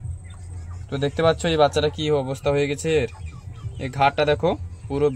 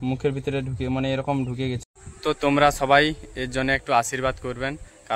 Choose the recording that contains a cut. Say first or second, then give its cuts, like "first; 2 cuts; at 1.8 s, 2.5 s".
second; 1 cut; at 1.8 s